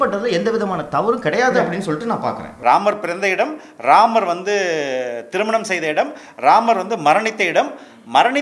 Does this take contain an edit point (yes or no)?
yes